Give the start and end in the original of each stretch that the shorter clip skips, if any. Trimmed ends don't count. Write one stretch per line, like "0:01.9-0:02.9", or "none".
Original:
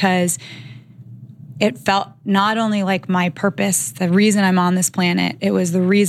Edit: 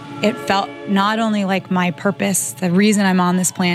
none